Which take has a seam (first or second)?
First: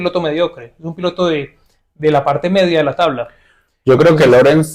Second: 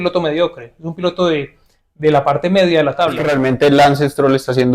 second